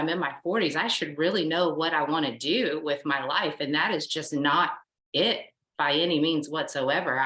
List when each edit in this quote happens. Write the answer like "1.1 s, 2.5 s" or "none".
none